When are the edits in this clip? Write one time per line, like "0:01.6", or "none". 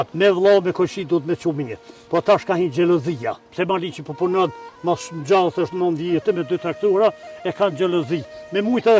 none